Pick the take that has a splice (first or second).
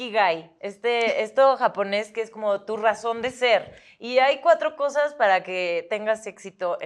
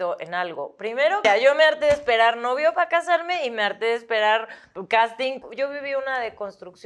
second